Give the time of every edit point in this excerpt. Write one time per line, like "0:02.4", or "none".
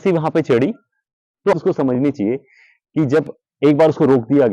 0:01.5